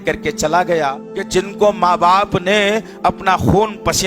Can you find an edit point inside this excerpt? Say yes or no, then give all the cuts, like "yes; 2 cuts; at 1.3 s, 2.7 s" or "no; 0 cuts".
yes; 1 cut; at 1.1 s